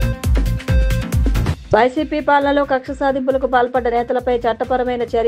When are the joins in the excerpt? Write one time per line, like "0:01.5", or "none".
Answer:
0:01.6